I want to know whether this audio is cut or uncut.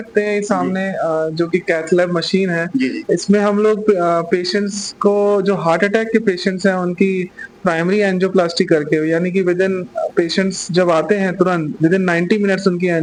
uncut